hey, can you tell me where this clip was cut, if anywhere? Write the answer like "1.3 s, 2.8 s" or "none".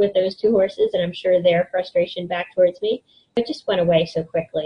3.4 s